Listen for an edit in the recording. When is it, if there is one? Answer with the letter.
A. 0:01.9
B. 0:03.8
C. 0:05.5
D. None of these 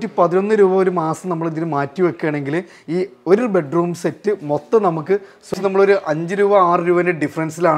C